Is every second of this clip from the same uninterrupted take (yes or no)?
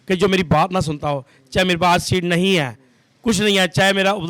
yes